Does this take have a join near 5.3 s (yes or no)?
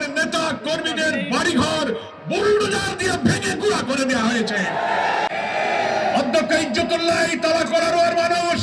yes